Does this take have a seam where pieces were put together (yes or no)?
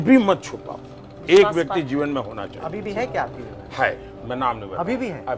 no